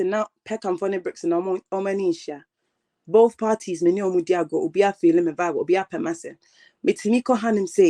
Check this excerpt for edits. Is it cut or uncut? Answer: uncut